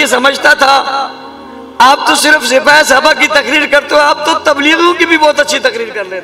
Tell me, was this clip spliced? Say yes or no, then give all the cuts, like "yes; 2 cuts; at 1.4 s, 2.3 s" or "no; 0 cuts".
no; 0 cuts